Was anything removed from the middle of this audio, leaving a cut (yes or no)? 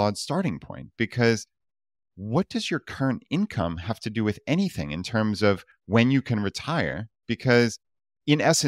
no